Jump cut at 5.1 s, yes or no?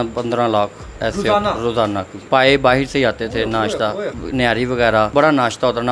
yes